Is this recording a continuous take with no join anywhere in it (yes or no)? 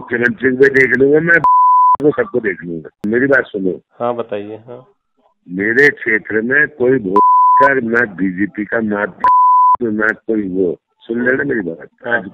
no